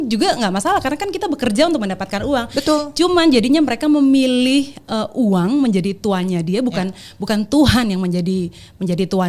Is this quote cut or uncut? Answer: uncut